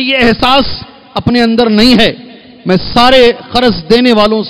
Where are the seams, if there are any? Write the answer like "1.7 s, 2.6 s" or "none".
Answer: none